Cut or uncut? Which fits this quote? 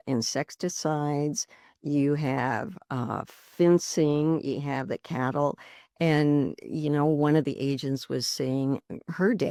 uncut